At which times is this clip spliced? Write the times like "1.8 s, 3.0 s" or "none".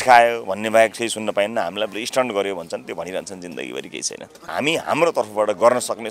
4.5 s